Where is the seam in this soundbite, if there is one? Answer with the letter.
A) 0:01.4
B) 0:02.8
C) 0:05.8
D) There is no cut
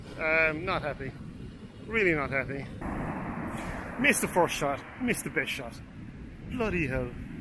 B